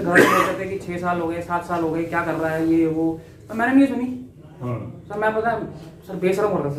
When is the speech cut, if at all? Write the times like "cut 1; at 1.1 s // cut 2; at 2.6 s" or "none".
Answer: none